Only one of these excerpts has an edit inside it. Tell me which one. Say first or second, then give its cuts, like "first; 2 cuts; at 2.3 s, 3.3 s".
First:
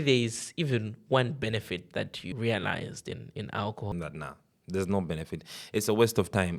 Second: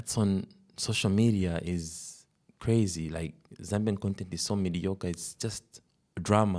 first; 2 cuts; at 2.2 s, 3.9 s